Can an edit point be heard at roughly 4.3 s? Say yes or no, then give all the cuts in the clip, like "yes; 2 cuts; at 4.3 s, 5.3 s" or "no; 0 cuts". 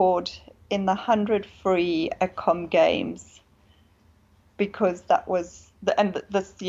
no; 0 cuts